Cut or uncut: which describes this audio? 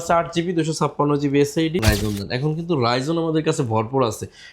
cut